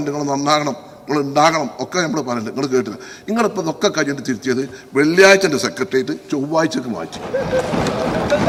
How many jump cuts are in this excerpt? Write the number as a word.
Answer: zero